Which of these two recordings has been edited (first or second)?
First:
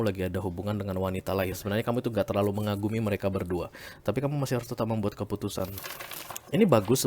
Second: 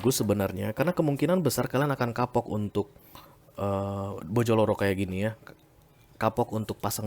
first